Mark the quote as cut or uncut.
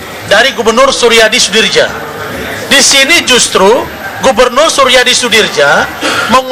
cut